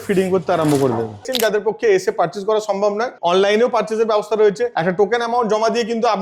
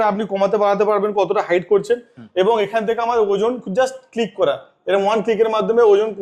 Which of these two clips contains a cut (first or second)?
first